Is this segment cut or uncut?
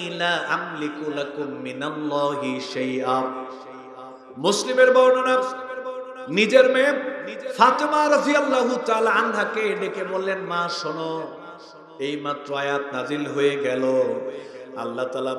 uncut